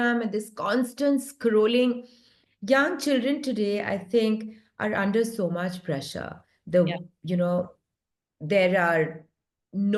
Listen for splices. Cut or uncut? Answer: uncut